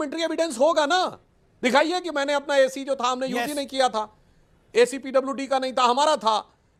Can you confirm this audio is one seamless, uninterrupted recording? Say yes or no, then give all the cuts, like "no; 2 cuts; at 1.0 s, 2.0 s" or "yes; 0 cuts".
yes; 0 cuts